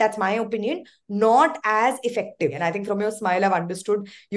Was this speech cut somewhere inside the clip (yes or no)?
yes